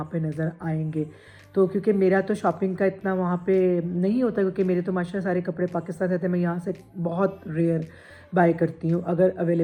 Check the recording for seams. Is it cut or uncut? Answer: uncut